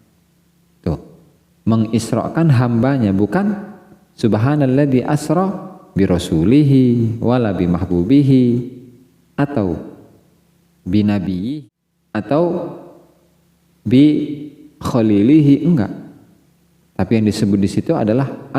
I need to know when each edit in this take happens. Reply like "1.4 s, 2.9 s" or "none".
11.5 s